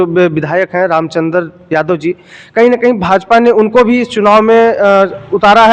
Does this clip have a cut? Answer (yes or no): no